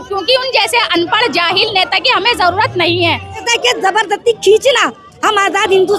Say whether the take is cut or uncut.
cut